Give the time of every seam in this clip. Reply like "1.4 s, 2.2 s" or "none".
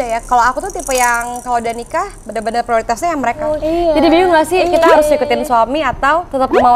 3.6 s